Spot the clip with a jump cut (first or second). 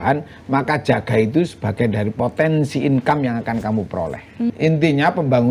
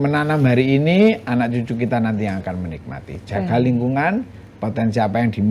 first